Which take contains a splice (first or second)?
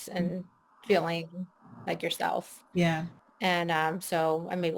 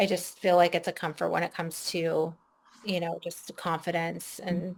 first